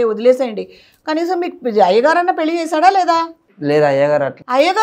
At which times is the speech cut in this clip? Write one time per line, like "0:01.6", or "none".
none